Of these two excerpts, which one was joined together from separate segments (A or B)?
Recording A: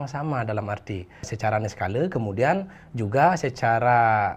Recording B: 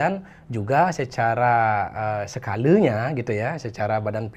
A